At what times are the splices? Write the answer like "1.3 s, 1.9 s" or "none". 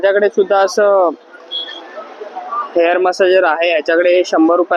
none